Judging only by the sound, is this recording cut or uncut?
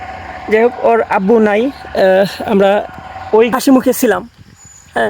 cut